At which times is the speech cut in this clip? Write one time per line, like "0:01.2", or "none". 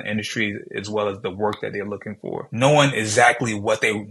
0:02.5